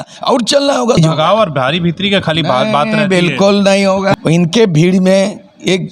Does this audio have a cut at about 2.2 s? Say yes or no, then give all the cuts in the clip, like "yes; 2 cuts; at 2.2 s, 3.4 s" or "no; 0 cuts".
no; 2 cuts; at 0.9 s, 4.2 s